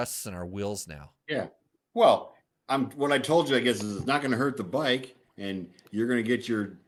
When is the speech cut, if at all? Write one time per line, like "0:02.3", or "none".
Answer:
none